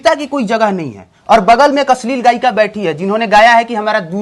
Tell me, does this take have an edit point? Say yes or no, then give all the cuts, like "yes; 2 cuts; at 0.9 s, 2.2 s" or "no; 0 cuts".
no; 0 cuts